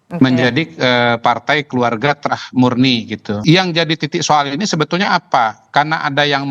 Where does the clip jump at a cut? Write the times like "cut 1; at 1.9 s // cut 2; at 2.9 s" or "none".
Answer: cut 1; at 3.4 s